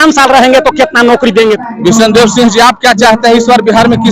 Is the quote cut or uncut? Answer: cut